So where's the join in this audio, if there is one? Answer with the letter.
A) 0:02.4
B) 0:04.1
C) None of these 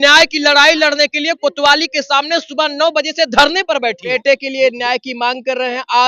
B